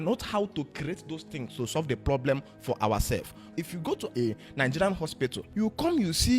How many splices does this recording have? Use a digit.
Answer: 2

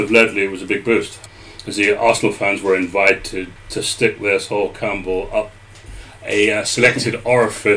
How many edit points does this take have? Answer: 0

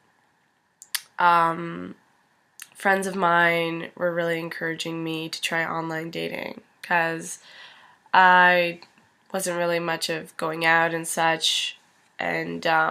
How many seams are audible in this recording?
1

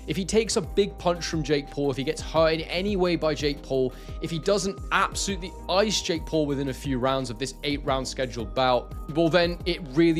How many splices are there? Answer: 0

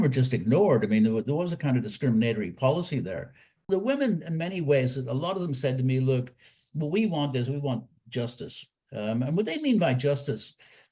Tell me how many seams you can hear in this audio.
1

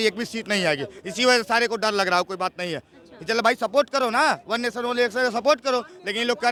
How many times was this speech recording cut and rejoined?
0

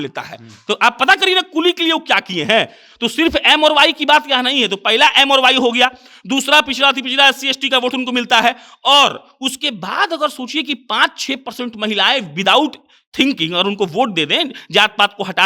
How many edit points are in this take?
0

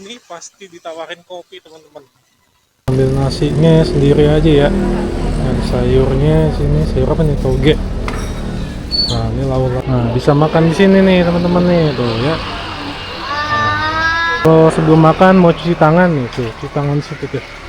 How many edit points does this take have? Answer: 3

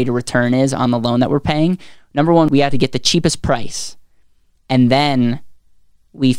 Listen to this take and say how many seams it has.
1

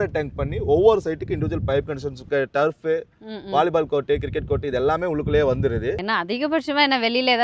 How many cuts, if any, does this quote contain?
2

